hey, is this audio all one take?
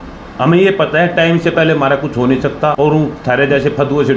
no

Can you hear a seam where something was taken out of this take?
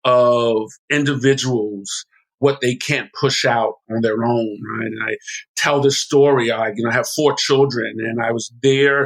yes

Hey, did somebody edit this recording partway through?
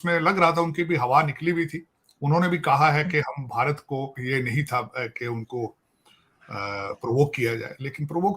yes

